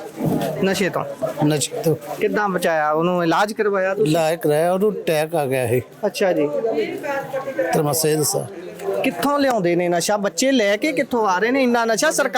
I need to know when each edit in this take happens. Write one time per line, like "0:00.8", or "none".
none